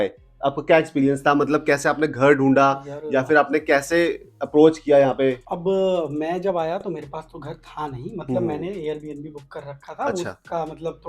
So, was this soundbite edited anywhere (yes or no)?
no